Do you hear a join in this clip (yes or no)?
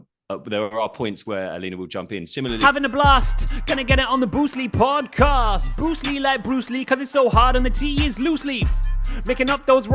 yes